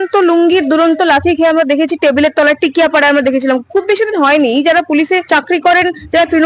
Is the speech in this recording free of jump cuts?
no; 1 cut; at 5.2 s

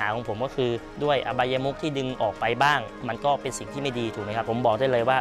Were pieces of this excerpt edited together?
yes; 2 cuts; at 0.9 s, 4.5 s

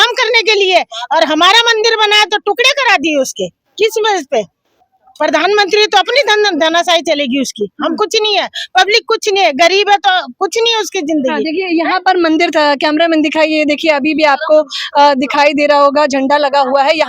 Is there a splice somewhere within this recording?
no; 0 cuts

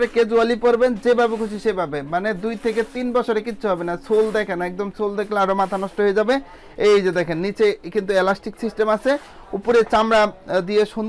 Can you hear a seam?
no; 0 cuts

